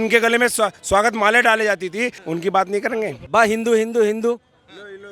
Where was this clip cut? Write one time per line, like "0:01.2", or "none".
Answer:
0:02.2
0:03.3

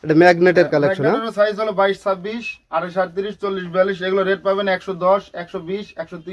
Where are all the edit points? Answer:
none

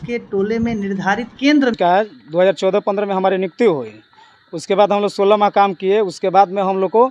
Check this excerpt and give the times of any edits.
0:01.8

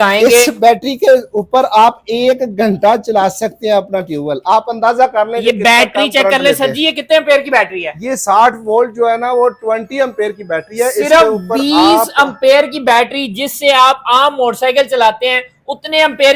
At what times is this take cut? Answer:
none

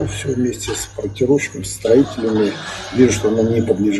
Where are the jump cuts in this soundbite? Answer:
none

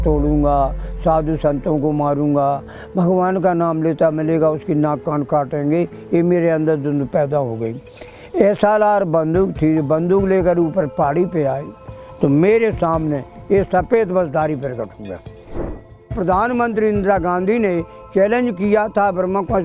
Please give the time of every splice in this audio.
0:15.7

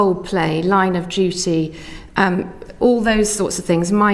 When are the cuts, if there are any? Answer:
0:01.8

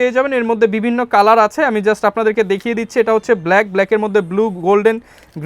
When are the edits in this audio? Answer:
none

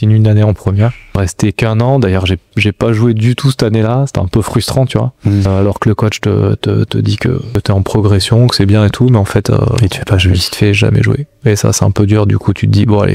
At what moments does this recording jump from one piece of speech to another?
0:01.1
0:05.5
0:07.5

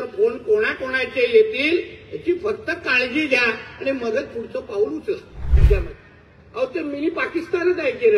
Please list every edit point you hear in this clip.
0:05.6

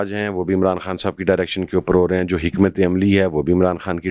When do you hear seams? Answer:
none

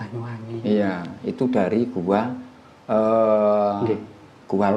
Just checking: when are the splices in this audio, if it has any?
none

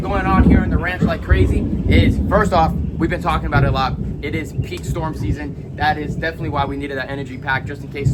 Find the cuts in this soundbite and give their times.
none

